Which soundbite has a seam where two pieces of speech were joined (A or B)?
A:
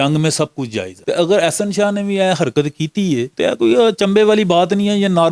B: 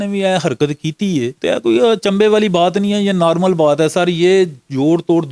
A